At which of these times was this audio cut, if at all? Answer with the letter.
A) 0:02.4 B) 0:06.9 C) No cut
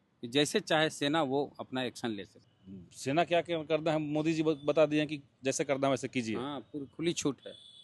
A